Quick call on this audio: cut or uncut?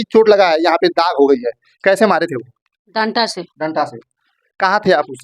uncut